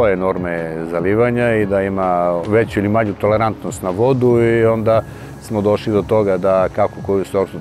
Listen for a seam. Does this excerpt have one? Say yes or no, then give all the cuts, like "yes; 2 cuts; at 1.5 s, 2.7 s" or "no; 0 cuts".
yes; 1 cut; at 2.4 s